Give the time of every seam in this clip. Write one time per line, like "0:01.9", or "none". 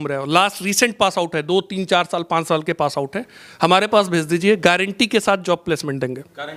none